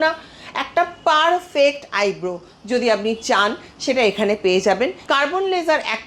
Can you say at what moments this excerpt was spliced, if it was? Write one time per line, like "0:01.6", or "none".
0:05.0